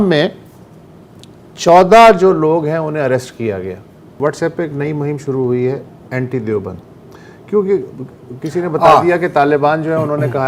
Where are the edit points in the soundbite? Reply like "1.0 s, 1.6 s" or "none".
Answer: 4.2 s